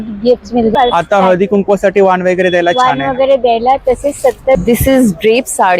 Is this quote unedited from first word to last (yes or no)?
no